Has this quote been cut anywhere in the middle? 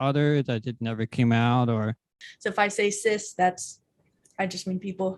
yes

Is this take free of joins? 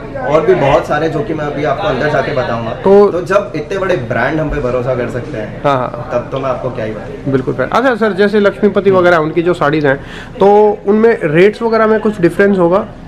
yes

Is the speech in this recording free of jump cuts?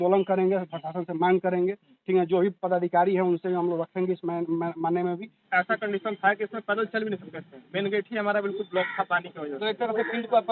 no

